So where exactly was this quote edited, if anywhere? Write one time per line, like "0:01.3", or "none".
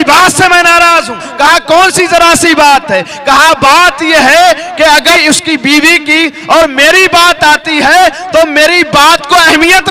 none